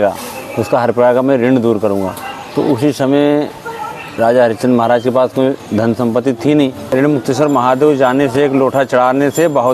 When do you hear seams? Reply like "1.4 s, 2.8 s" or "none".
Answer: 6.8 s